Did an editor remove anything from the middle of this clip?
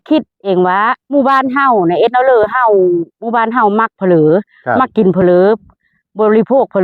yes; 1 cut; at 1.0 s

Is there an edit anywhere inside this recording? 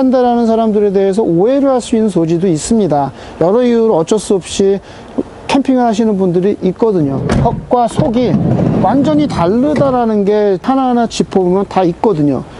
yes; 2 cuts; at 7.2 s, 10.6 s

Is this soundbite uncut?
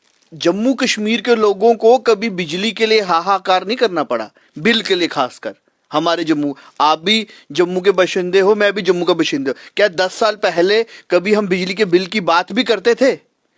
yes; 0 cuts

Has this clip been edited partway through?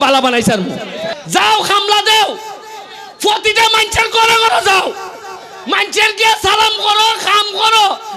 yes; 1 cut; at 1.1 s

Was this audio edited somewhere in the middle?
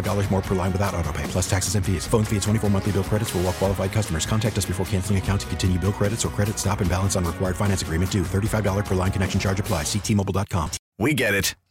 yes; 1 cut; at 10.8 s

